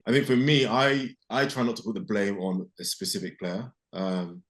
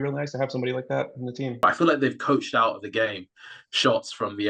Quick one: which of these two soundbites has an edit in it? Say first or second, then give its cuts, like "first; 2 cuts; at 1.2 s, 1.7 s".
second; 1 cut; at 1.6 s